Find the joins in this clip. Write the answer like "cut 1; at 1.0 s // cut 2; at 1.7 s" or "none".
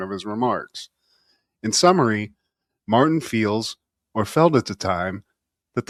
none